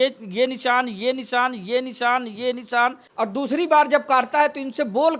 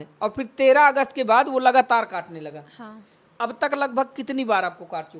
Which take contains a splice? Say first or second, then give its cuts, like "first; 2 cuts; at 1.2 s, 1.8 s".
first; 1 cut; at 3.0 s